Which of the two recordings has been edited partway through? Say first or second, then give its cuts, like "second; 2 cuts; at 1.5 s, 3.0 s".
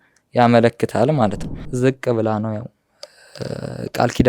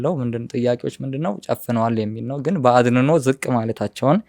first; 1 cut; at 1.6 s